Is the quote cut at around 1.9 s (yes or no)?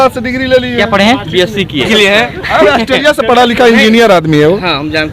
yes